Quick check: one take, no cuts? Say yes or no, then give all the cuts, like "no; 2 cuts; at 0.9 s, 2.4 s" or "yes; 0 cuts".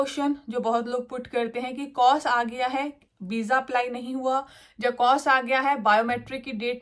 yes; 0 cuts